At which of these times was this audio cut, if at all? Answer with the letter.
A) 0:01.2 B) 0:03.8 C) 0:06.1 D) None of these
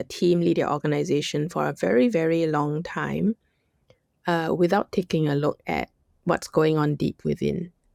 D